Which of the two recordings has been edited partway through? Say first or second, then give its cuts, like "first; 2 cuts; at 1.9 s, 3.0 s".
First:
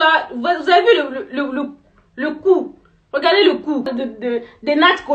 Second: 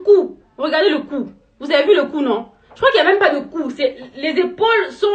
first; 1 cut; at 3.9 s